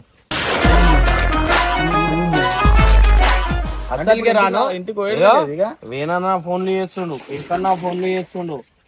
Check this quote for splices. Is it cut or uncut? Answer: uncut